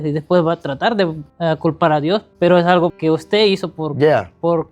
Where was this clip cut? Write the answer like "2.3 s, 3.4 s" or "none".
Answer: 1.3 s, 2.3 s, 3.0 s